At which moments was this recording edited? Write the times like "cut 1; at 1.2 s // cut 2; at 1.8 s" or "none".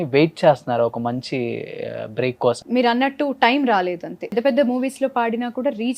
cut 1; at 2.6 s // cut 2; at 4.3 s

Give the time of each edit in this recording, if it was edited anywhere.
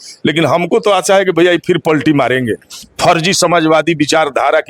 cut 1; at 2.9 s

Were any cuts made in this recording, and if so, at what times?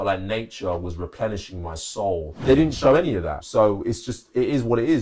cut 1; at 2.3 s // cut 2; at 3.4 s

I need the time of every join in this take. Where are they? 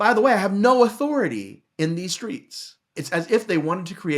cut 1; at 3.0 s

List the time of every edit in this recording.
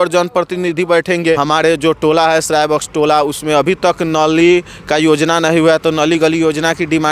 cut 1; at 1.4 s

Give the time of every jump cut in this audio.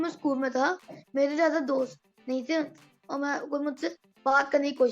none

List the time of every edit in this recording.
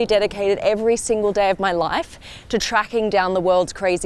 none

